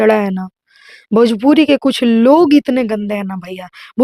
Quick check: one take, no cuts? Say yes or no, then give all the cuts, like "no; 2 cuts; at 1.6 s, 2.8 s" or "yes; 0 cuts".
yes; 0 cuts